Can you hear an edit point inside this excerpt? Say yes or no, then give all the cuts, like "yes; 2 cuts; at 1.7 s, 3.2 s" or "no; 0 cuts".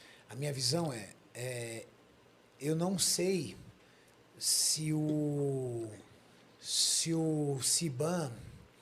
no; 0 cuts